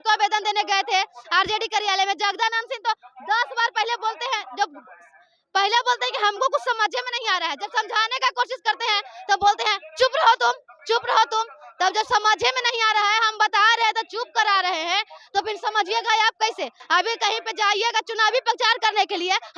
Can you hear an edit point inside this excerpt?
no; 0 cuts

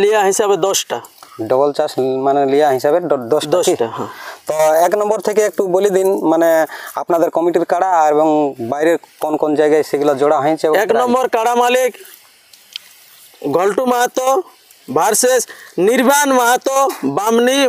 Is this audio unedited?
yes; 0 cuts

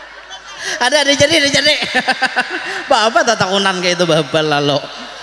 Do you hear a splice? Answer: no; 0 cuts

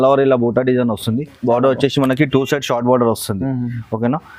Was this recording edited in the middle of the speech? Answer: no; 0 cuts

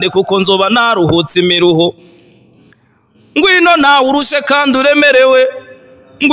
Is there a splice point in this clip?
no; 0 cuts

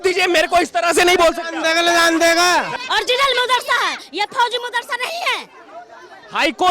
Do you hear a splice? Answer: yes; 1 cut; at 2.7 s

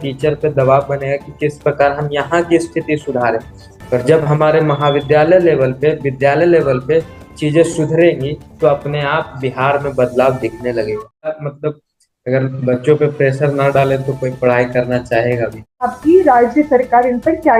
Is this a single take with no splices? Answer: no; 2 cuts; at 11.4 s, 15.9 s

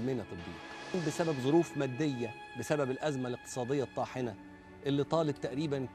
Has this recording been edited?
yes; 1 cut; at 1.0 s

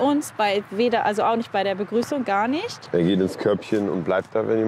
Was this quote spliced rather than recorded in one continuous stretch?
no; 0 cuts

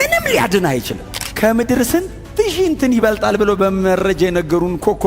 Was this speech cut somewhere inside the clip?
yes; 1 cut; at 1.2 s

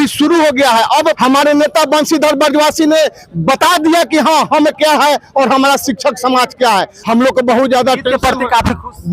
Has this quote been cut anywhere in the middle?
yes; 2 cuts; at 1.1 s, 6.9 s

